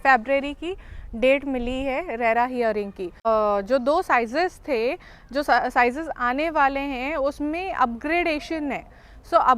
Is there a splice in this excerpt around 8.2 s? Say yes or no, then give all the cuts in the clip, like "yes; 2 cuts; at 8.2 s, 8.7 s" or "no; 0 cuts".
no; 1 cut; at 3.3 s